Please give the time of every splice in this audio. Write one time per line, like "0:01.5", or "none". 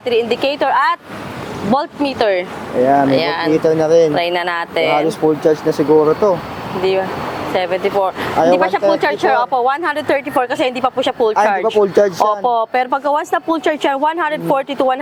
none